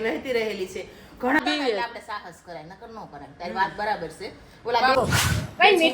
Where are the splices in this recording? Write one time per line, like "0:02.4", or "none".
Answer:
0:01.4
0:05.0